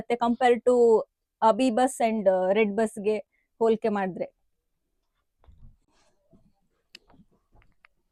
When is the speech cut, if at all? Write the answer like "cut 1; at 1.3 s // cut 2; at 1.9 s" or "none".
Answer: none

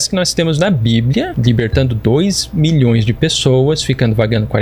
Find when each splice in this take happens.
cut 1; at 1.3 s

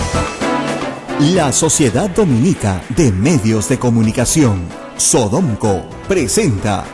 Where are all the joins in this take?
cut 1; at 1.0 s

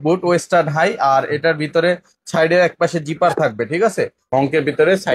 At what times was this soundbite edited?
cut 1; at 4.2 s

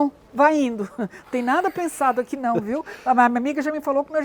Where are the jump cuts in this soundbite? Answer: none

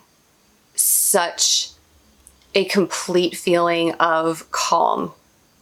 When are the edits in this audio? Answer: none

